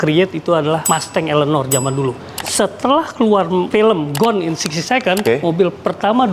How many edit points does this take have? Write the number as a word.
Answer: two